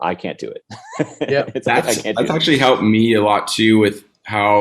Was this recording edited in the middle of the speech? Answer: no; 0 cuts

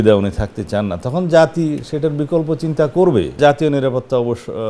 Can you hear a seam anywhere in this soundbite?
yes; 1 cut; at 3.4 s

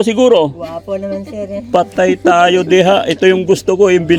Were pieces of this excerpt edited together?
no; 0 cuts

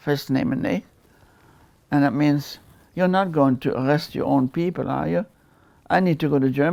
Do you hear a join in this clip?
no; 0 cuts

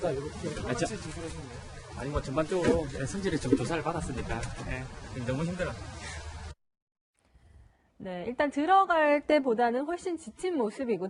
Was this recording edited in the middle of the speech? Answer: no; 0 cuts

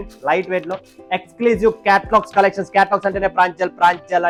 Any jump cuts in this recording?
no; 0 cuts

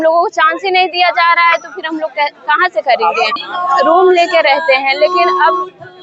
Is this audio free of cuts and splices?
no; 1 cut; at 3.5 s

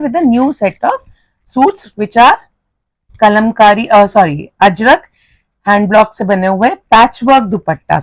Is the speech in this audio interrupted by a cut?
no; 0 cuts

